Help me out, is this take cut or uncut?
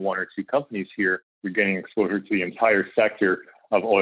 cut